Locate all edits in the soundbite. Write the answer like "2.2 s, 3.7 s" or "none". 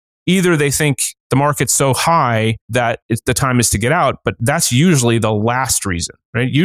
2.8 s